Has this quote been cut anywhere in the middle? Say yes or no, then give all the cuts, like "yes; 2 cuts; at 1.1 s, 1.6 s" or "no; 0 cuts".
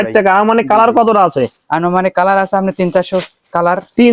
no; 0 cuts